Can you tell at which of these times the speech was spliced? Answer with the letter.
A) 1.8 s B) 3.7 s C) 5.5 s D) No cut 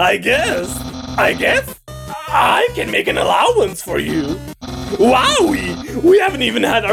D